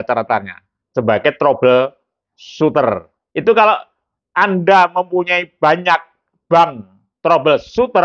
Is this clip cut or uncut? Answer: cut